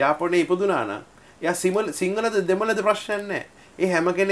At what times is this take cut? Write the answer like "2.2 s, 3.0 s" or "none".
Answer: none